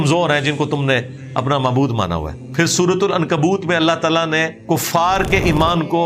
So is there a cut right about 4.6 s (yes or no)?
yes